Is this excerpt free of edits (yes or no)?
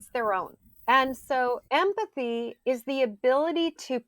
no